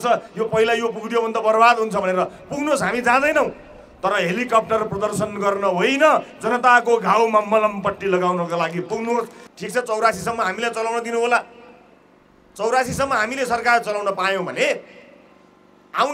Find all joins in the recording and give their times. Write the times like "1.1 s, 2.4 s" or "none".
9.4 s